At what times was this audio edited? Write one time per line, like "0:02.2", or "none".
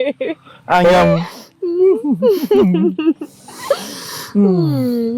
none